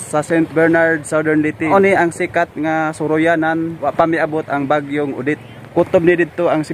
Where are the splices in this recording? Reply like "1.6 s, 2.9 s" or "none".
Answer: 1.7 s, 3.8 s, 5.5 s